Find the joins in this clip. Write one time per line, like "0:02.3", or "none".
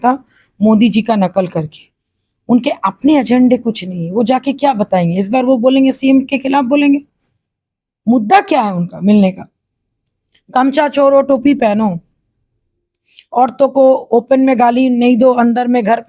none